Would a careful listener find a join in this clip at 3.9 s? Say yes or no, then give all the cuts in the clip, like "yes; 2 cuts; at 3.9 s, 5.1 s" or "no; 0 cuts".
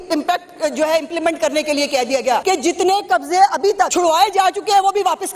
yes; 2 cuts; at 2.4 s, 3.9 s